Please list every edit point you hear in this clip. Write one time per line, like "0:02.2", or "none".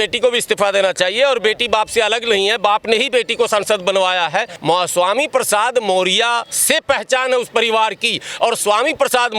0:04.5

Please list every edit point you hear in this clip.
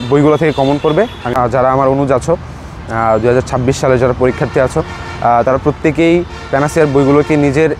0:01.3

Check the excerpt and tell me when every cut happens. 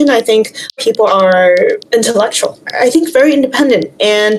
0:01.0

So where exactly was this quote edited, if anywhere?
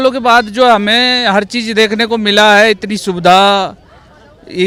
none

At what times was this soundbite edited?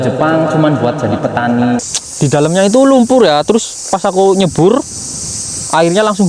0:01.9

